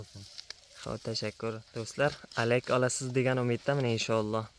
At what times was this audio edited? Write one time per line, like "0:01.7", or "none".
0:01.7